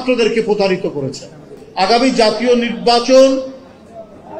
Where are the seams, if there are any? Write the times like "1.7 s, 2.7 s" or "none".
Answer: 1.6 s